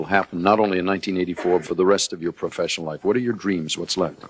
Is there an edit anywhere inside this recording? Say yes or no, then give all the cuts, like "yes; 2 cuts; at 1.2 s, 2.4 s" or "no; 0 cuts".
yes; 1 cut; at 1.6 s